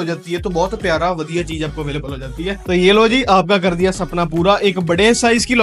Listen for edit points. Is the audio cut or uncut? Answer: cut